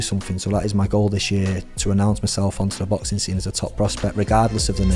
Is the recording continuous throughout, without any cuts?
yes; 0 cuts

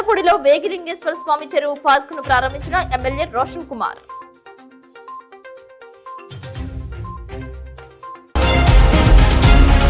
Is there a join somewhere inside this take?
yes; 1 cut; at 8.3 s

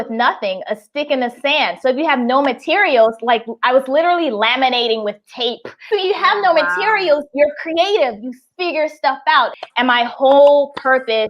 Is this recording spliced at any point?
yes; 2 cuts; at 5.7 s, 9.6 s

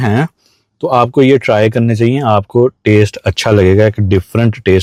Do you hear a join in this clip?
no; 0 cuts

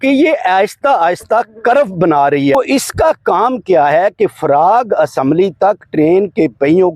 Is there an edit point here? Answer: yes; 1 cut; at 2.6 s

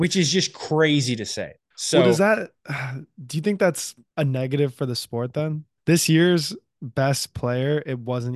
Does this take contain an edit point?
no; 0 cuts

